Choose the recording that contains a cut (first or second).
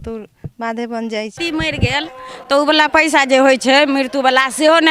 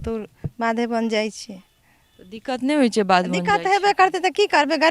first